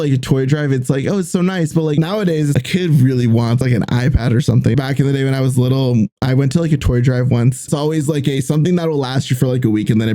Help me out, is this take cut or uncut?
cut